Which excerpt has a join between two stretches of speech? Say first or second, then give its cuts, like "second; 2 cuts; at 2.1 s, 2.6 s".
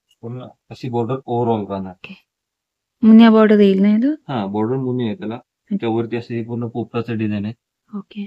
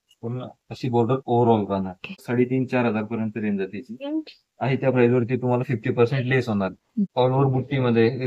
second; 2 cuts; at 2.2 s, 7.1 s